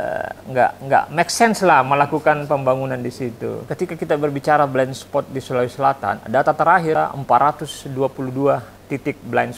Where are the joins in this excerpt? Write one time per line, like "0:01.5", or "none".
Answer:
0:03.7
0:07.0